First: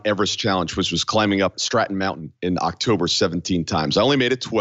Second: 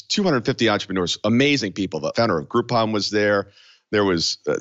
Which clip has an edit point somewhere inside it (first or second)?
first